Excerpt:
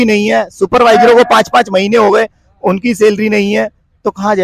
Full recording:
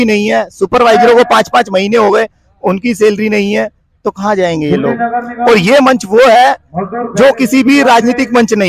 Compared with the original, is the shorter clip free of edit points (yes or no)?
yes